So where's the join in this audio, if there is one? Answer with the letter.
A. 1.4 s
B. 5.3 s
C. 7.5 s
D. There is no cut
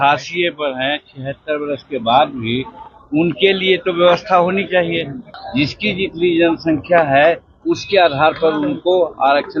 B